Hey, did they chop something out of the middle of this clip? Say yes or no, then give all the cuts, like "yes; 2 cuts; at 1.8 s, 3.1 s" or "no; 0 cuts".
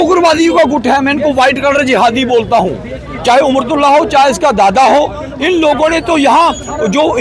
no; 0 cuts